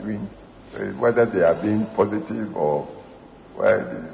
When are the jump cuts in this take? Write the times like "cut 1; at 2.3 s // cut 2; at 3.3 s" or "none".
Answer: none